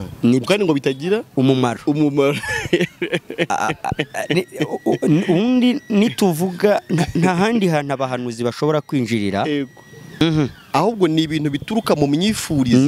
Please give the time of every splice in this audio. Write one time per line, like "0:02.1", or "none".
0:10.2